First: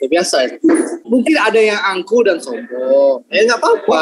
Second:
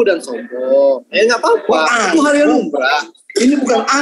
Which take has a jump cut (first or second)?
first